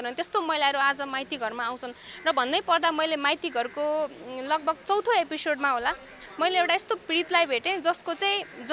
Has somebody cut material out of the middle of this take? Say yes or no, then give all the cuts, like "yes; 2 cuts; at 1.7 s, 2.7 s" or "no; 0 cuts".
no; 0 cuts